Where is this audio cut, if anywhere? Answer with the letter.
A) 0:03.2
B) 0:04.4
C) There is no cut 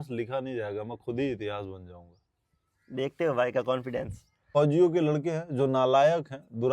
B